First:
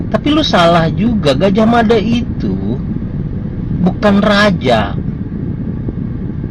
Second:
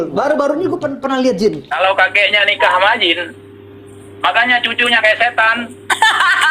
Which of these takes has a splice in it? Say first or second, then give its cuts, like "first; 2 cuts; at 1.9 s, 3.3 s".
second; 1 cut; at 1.7 s